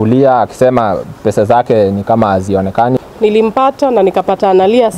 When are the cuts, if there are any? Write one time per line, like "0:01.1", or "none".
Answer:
0:03.0